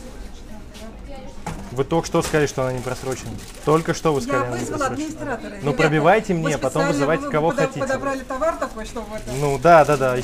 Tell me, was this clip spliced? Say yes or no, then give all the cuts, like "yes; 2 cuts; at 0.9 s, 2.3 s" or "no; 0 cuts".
no; 0 cuts